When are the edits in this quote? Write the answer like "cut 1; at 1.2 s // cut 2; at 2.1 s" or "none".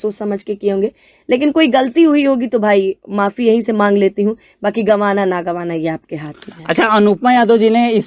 none